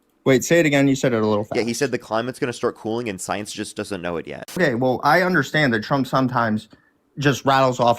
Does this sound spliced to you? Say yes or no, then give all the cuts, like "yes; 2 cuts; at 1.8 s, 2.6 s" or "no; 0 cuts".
yes; 1 cut; at 4.6 s